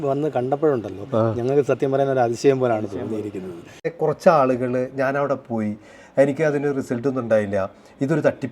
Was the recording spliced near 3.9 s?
yes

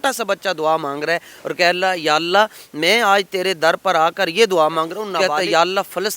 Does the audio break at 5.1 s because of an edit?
yes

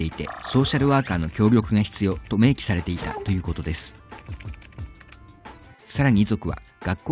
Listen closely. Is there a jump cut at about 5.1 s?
no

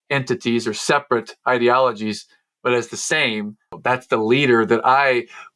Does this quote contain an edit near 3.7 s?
yes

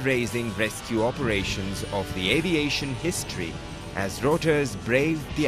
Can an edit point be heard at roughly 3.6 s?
no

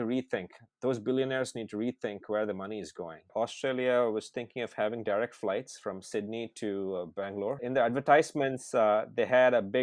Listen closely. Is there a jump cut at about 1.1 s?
no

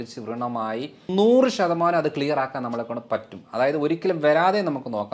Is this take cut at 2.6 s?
no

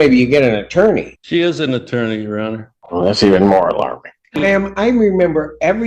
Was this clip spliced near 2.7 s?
yes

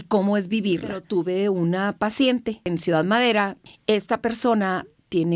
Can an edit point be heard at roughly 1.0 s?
yes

